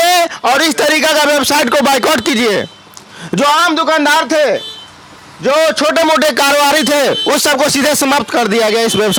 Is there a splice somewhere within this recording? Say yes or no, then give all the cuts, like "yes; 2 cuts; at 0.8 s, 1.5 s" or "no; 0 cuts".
no; 0 cuts